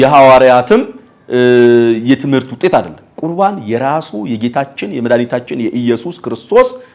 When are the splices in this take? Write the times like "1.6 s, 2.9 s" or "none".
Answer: none